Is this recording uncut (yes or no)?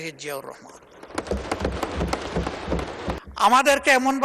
no